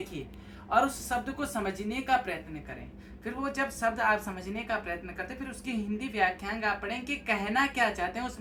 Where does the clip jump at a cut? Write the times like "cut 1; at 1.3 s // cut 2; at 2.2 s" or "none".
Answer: none